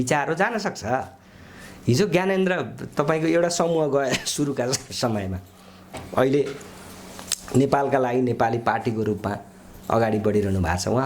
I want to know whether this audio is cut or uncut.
uncut